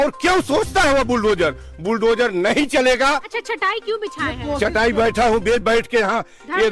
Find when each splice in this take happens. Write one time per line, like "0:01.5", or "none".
0:03.3